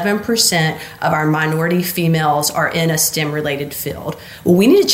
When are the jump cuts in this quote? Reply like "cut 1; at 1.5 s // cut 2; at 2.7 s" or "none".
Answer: none